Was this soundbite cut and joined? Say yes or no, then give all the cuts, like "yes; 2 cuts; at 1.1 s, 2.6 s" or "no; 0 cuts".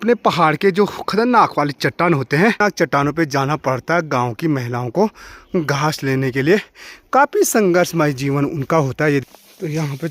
yes; 2 cuts; at 2.6 s, 9.2 s